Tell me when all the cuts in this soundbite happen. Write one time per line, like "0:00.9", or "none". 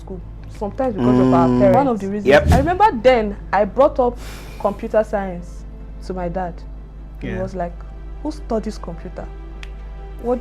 0:02.5

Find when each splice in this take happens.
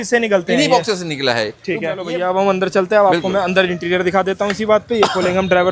0:02.0

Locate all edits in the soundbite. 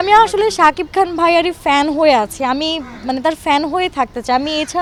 none

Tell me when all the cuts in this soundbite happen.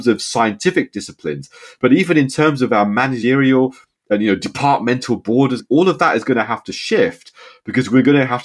0:03.2
0:05.6

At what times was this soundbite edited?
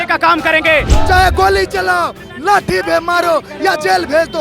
0:00.9

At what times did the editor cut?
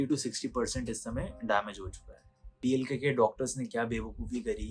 0:02.5

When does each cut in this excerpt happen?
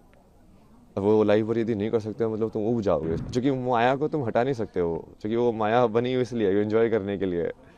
0:03.2

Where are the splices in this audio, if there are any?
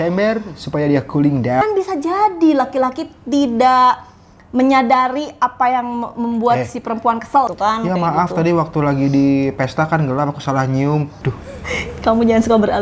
0:01.6
0:07.5
0:11.1

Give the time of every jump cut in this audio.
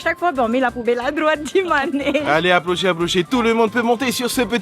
0:02.2

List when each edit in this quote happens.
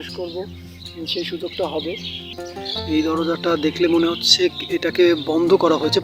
0:02.3

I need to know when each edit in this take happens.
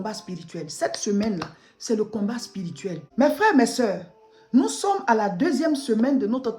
0:03.0

